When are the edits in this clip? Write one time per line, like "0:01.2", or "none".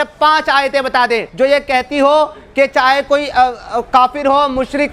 0:01.3